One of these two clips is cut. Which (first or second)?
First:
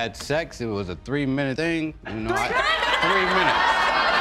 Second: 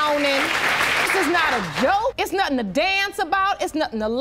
first